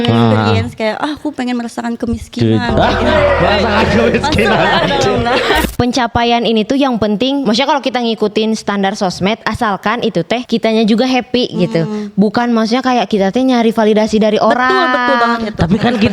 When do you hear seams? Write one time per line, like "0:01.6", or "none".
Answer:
0:05.6
0:07.4
0:10.4